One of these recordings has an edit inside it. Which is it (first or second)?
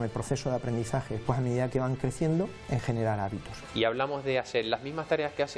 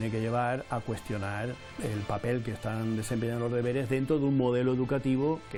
first